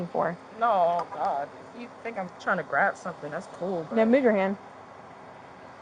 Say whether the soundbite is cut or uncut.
uncut